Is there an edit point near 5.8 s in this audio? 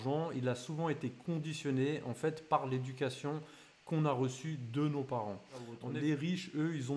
yes; 1 cut; at 5.8 s

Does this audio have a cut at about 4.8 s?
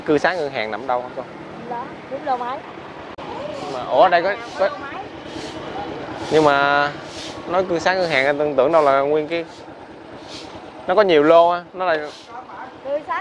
no; 1 cut; at 3.2 s

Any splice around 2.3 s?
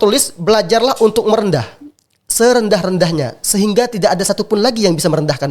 no; 0 cuts

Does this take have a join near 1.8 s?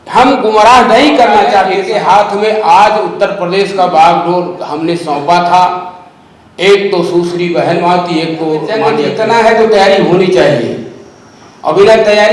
yes; 2 cuts; at 1.8 s, 9.0 s

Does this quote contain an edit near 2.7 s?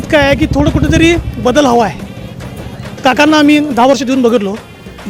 no; 0 cuts

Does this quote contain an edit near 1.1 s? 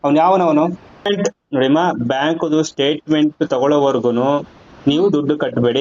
yes; 1 cut; at 1.1 s

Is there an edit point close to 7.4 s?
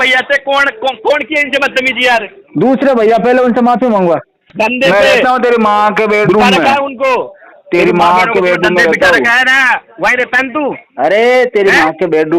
no; 1 cut; at 4.4 s

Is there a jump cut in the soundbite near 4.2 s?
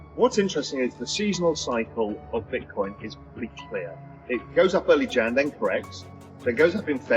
yes; 1 cut; at 4.2 s

